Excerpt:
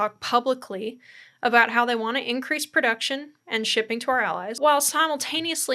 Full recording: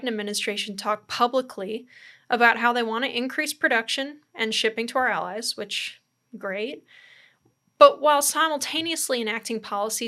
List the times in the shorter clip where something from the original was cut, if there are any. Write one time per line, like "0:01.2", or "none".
0:04.6